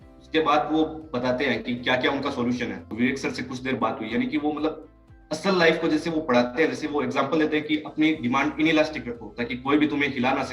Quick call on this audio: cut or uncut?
cut